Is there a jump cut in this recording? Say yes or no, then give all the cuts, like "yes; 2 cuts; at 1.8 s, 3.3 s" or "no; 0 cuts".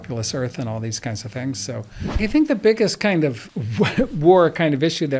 yes; 2 cuts; at 2.2 s, 3.5 s